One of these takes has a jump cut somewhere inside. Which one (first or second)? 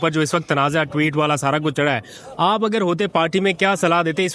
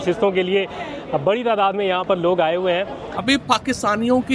second